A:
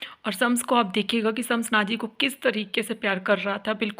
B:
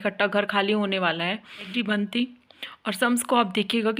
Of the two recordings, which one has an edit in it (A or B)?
B